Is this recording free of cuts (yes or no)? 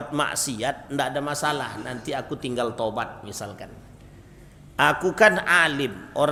yes